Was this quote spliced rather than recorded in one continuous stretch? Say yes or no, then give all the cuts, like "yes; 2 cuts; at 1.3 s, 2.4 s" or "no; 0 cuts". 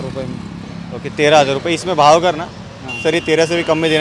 no; 0 cuts